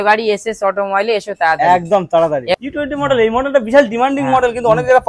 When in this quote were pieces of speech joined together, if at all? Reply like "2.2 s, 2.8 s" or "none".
2.6 s